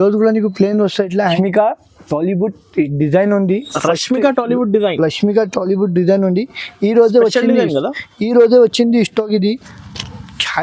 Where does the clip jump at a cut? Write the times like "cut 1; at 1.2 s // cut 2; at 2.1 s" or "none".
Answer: cut 1; at 1.2 s